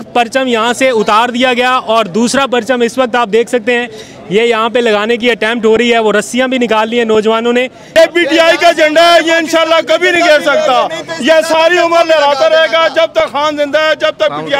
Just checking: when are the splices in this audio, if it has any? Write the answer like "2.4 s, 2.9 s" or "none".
7.8 s